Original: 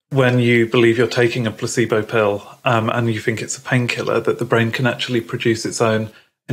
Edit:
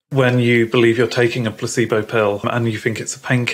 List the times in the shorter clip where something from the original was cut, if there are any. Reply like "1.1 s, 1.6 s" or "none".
2.4 s

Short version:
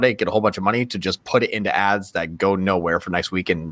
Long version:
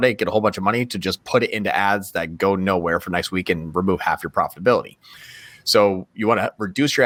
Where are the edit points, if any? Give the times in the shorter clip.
none

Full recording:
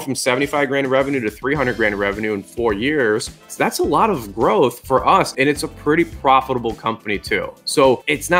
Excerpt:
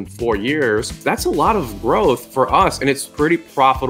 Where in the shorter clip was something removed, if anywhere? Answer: 0.9 s, 2.9 s

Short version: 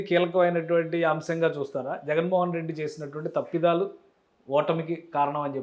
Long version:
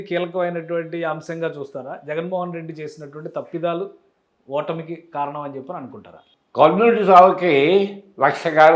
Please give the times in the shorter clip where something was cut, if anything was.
none

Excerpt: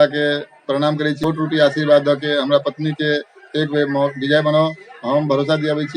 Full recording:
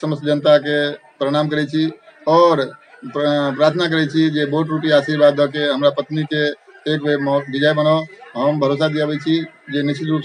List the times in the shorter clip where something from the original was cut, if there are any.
1.2 s

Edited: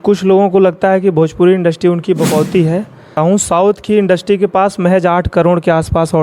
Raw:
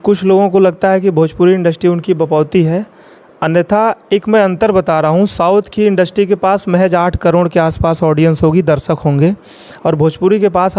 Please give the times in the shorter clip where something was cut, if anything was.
3.2 s

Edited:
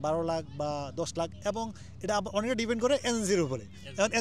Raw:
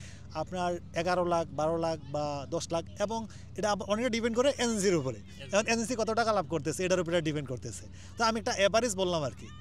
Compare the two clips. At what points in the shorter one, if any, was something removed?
none

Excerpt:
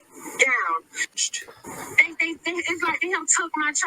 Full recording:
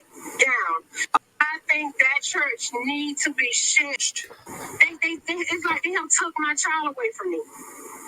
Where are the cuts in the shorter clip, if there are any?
1.1 s

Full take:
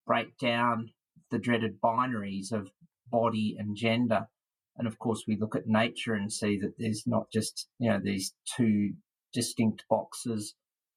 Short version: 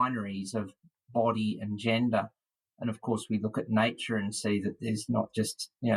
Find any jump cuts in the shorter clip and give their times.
none

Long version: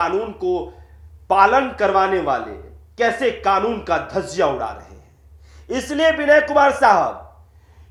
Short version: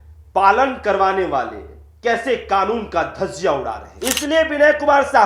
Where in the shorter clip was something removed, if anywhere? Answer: 3.9 s

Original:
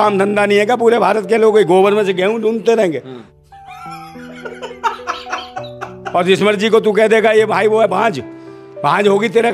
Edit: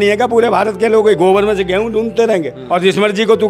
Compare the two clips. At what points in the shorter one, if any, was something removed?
2.6 s

